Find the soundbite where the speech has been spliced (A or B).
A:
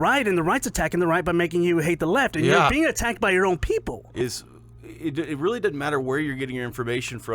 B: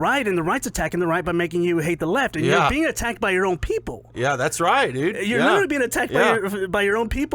A